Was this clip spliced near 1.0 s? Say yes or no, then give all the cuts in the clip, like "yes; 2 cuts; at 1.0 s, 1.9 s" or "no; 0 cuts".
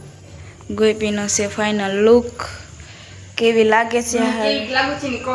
no; 0 cuts